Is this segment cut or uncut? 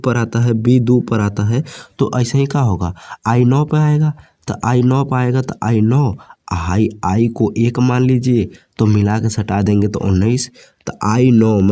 uncut